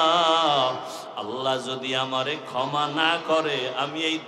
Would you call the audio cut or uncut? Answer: uncut